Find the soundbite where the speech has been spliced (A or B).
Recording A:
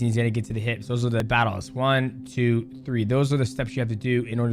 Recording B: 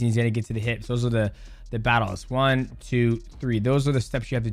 A